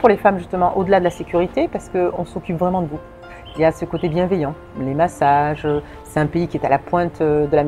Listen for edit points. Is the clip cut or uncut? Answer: uncut